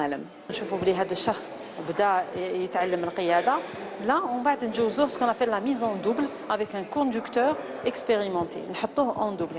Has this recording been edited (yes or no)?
yes